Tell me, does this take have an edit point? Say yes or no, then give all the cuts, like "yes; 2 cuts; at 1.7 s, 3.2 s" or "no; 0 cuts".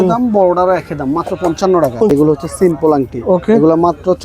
yes; 1 cut; at 2.3 s